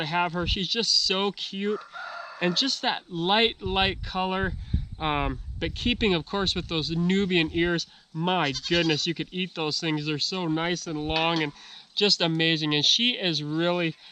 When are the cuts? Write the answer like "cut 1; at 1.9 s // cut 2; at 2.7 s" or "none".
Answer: none